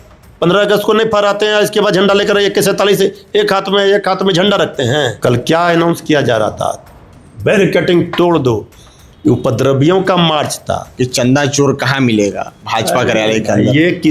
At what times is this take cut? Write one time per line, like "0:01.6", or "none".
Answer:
0:05.1
0:10.9